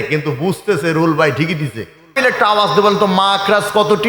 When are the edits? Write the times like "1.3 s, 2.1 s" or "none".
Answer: 2.2 s